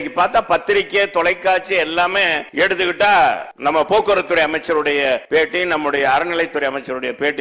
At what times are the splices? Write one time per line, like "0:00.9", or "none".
0:02.4
0:03.5
0:05.2